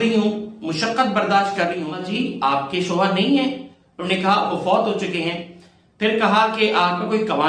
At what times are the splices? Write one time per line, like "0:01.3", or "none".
0:02.0